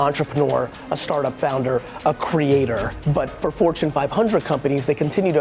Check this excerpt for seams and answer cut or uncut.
cut